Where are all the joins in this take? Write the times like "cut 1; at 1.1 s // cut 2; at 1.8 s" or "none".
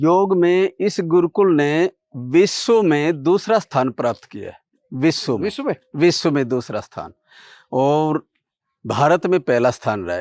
none